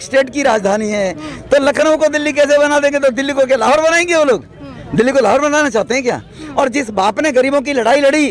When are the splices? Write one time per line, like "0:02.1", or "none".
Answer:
0:06.4